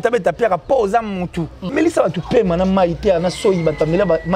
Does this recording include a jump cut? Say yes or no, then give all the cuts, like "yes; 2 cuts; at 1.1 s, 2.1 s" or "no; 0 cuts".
yes; 1 cut; at 1.7 s